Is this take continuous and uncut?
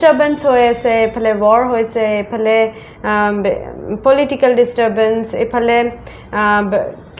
yes; 0 cuts

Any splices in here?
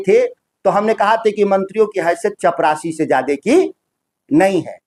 no; 0 cuts

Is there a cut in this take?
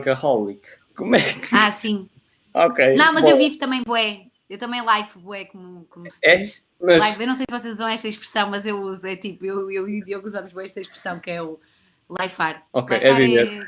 no; 0 cuts

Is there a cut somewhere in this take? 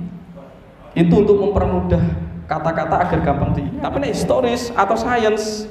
yes; 1 cut; at 3.8 s

